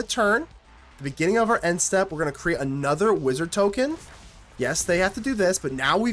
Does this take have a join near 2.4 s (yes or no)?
no